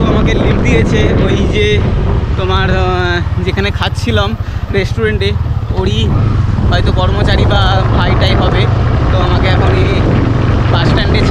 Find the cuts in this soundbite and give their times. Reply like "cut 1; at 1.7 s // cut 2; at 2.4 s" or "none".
none